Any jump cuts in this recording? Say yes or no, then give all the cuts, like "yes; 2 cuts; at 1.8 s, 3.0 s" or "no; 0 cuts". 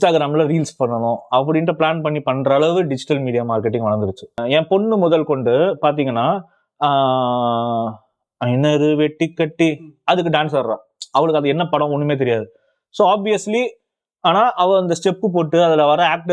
yes; 1 cut; at 4.4 s